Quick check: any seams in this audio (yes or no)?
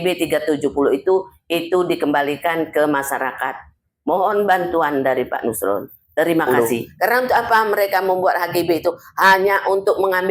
yes